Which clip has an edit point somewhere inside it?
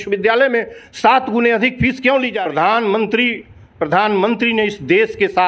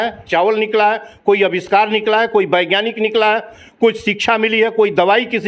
first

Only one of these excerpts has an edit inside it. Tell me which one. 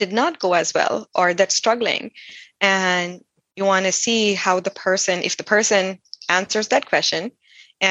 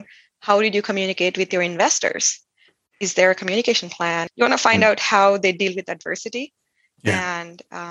second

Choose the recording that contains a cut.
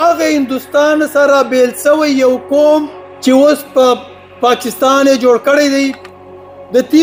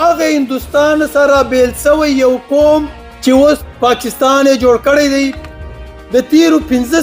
second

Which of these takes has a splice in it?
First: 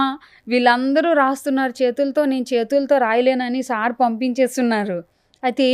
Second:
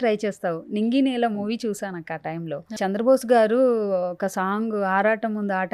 second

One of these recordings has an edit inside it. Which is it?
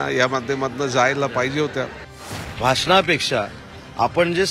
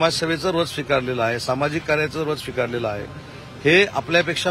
first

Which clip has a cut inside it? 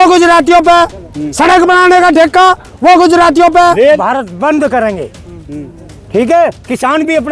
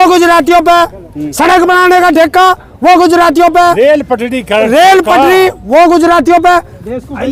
first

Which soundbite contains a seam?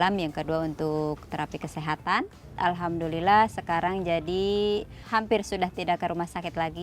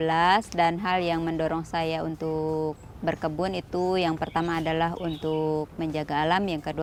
first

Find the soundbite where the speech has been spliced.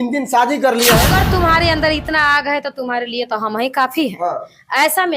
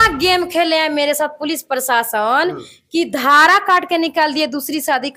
first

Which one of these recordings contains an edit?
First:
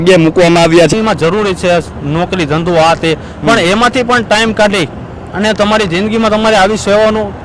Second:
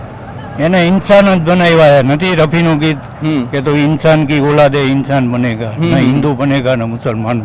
first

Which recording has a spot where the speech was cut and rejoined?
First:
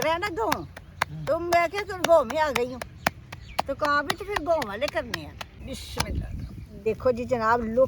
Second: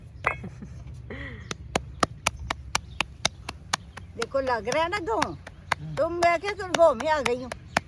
first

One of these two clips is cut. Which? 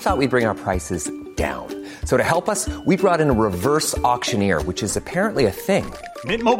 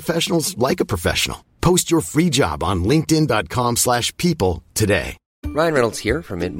second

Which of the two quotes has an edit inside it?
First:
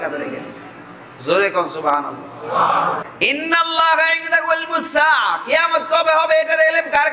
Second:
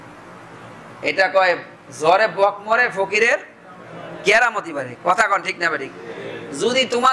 first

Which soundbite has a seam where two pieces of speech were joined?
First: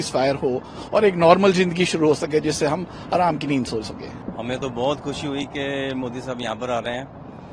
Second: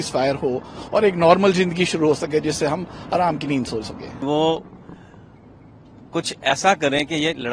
second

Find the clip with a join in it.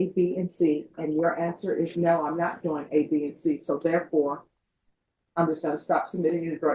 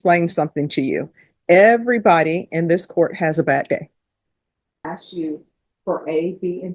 second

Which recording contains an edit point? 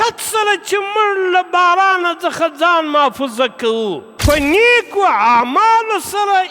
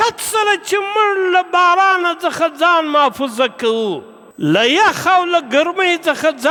first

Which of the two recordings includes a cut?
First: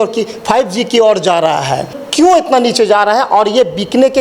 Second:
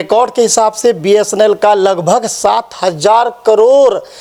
first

